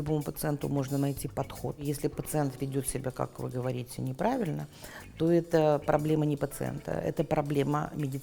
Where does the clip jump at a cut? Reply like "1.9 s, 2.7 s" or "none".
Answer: 1.8 s